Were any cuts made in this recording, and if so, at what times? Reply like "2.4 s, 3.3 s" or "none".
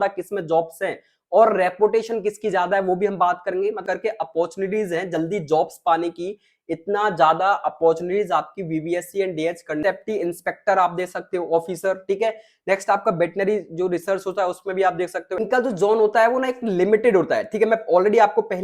3.8 s, 9.8 s, 15.3 s